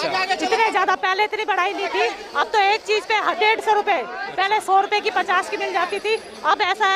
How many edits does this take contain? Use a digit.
0